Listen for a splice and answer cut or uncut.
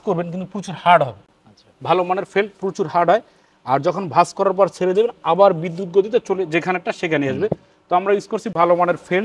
uncut